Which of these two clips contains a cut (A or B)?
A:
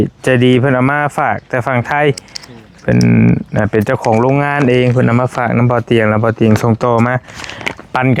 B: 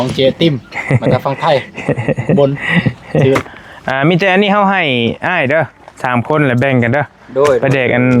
B